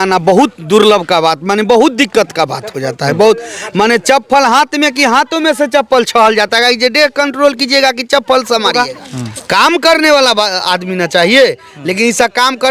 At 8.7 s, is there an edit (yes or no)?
yes